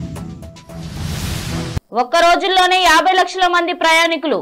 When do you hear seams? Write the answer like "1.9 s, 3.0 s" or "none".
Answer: 1.3 s